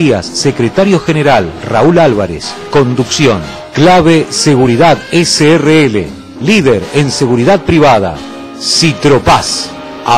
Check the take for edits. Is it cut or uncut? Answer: uncut